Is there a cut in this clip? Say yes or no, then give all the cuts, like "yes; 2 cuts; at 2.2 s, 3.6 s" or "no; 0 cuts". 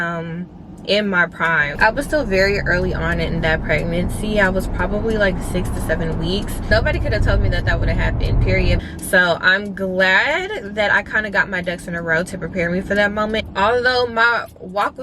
yes; 4 cuts; at 1.7 s, 6.7 s, 8.8 s, 13.4 s